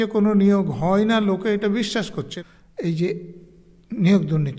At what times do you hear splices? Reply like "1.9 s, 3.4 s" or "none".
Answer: 2.2 s